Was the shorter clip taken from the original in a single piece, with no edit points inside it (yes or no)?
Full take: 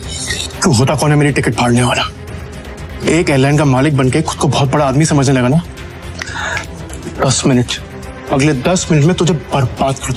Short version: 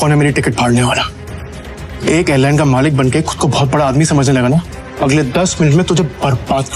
no